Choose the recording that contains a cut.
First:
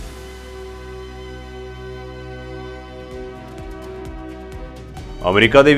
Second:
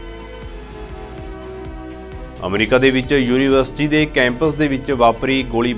second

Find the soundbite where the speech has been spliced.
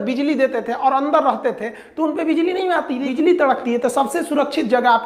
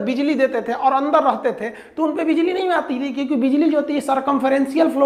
first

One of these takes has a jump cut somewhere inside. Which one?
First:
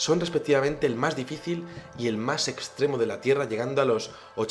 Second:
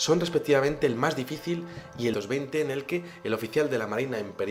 first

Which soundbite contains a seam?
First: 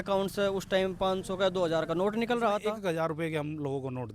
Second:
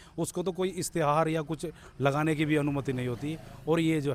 first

